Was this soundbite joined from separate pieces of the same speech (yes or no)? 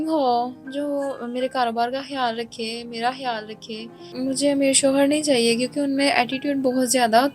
yes